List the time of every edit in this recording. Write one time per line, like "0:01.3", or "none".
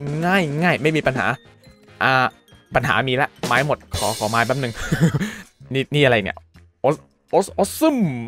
0:05.4